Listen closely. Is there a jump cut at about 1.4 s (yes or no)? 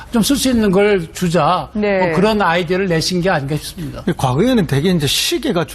yes